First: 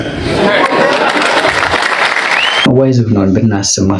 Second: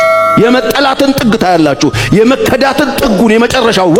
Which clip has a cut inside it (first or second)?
first